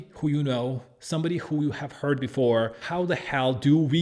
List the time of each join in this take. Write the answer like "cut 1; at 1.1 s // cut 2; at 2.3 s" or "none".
cut 1; at 2.8 s